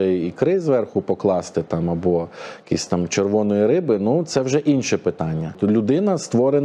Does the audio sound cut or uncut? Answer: cut